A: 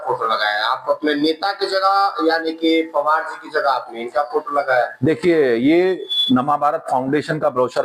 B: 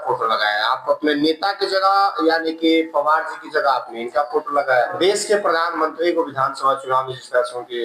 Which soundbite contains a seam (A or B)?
B